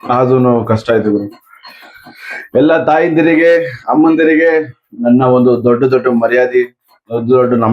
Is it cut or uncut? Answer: uncut